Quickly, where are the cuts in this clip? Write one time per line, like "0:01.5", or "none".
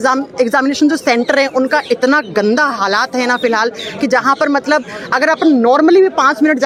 none